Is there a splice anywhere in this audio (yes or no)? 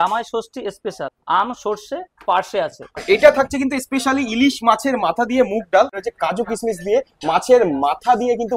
yes